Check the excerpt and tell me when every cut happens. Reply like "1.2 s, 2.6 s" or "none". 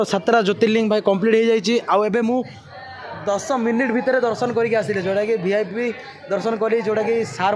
none